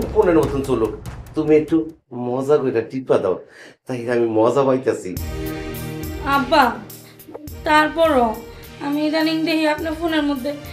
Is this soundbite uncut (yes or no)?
yes